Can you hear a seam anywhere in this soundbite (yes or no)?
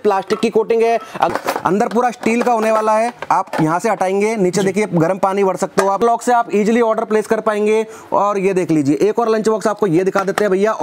yes